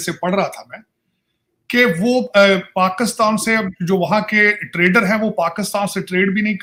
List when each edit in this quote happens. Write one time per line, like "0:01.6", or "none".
none